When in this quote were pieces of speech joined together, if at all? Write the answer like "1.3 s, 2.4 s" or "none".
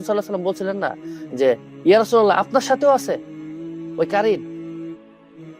none